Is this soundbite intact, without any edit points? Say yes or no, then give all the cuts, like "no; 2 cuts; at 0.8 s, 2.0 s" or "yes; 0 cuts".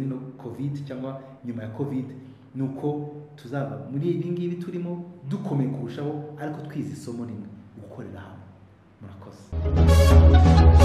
yes; 0 cuts